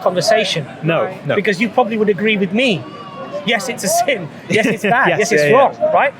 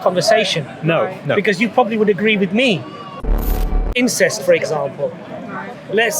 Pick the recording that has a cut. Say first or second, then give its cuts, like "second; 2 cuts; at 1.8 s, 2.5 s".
second; 1 cut; at 3.5 s